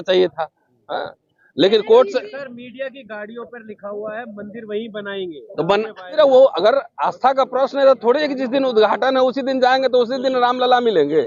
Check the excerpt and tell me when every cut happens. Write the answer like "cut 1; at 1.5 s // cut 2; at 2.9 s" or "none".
cut 1; at 6.1 s